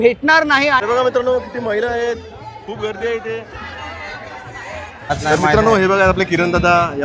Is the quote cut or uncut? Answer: cut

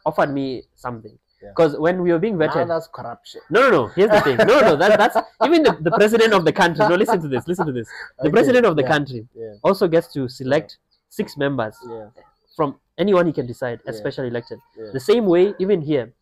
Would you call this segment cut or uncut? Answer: uncut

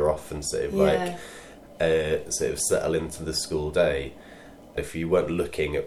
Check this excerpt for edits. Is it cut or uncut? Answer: cut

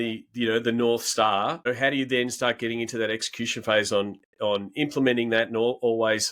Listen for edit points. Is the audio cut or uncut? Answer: uncut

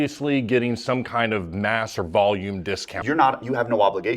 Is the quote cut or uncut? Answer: cut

